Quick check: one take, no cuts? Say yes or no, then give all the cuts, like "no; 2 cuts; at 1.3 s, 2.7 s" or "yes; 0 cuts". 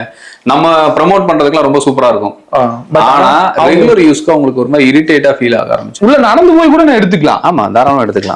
no; 1 cut; at 5.9 s